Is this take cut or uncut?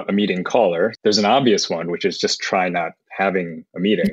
cut